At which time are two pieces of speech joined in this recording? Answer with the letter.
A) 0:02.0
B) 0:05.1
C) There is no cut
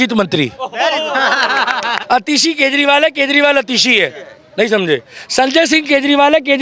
A